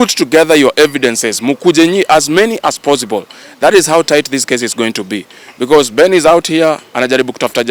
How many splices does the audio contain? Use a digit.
0